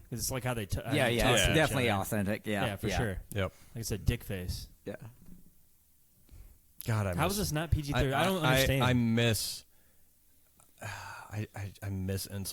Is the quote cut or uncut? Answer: uncut